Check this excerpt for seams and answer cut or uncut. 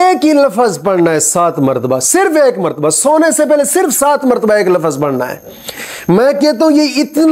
uncut